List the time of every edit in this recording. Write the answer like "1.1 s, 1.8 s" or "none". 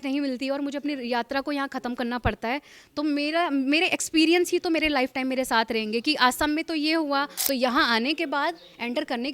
7.4 s